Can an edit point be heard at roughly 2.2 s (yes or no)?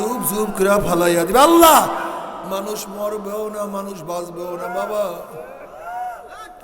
yes